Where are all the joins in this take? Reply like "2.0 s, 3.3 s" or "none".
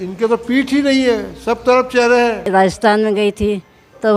2.5 s